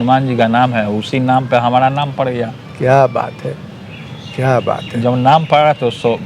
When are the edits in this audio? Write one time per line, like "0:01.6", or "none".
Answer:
none